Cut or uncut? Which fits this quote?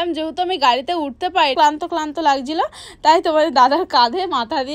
cut